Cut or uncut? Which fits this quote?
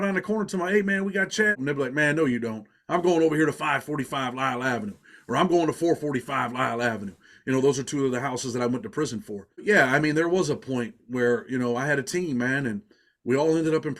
cut